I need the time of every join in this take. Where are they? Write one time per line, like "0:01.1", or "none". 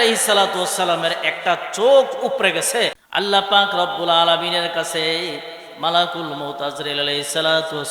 0:03.0

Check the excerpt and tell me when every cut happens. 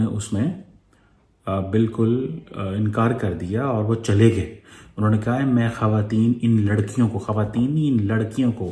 none

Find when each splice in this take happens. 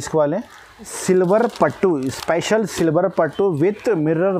0:00.9

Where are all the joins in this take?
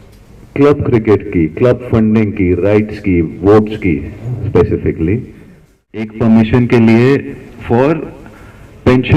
0:06.1

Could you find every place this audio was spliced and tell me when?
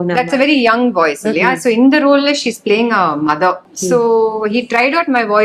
0:03.7

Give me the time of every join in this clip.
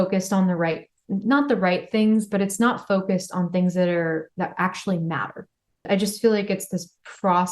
0:05.8

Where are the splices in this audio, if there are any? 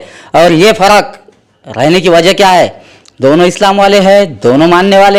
none

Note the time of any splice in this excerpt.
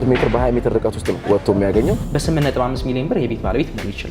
0:01.2
0:02.1

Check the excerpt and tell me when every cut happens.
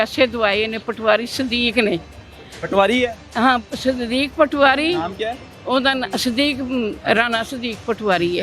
none

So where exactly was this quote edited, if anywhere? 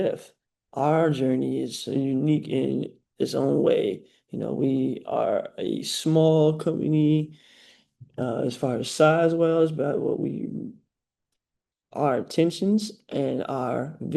none

